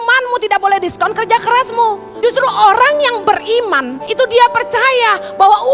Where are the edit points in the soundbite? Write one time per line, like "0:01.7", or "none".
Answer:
0:02.1
0:04.0